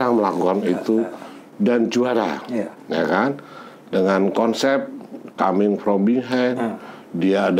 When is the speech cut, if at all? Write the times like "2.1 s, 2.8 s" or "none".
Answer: none